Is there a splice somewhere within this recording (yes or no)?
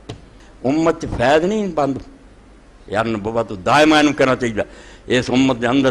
no